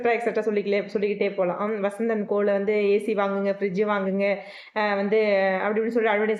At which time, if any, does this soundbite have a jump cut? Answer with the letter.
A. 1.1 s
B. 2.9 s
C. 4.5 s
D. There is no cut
D